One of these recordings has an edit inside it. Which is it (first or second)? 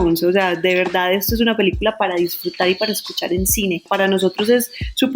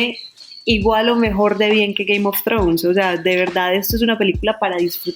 first